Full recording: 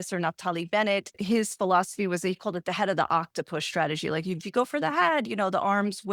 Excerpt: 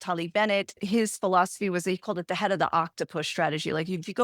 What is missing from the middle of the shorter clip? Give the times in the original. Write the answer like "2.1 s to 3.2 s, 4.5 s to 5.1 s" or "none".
none